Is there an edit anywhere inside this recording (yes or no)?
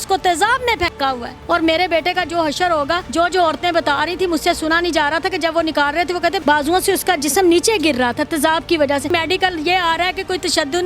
yes